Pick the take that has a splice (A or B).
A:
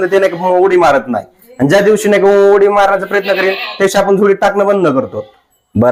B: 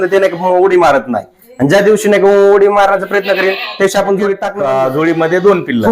B